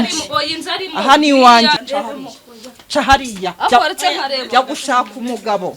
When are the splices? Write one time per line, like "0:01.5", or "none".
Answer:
0:01.8

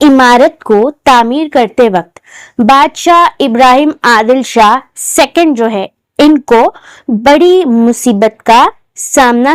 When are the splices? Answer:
none

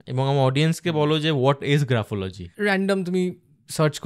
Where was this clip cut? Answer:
0:02.4

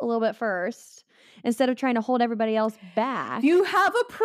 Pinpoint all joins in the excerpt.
0:03.3

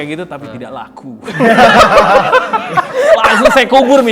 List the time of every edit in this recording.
0:02.9

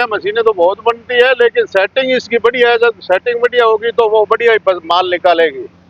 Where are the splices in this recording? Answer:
none

